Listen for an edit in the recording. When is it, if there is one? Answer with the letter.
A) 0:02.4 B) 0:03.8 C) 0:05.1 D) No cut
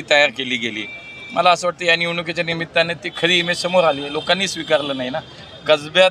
D